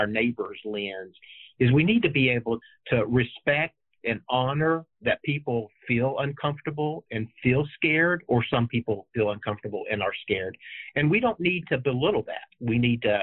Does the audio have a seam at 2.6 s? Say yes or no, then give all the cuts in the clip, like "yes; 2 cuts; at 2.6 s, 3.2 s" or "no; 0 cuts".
yes; 1 cut; at 2.6 s